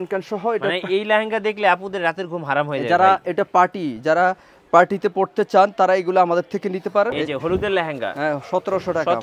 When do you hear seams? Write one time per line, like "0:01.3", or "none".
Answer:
0:07.1